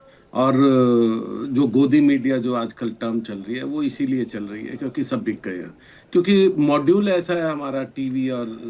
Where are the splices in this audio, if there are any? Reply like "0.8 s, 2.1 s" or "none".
none